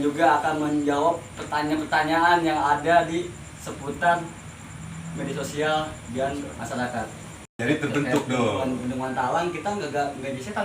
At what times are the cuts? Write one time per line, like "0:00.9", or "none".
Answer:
0:07.4